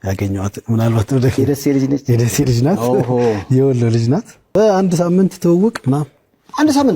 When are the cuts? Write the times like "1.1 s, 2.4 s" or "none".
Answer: 4.5 s